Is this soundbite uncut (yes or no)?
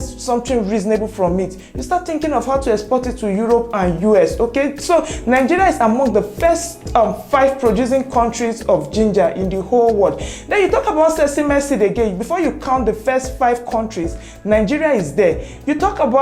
yes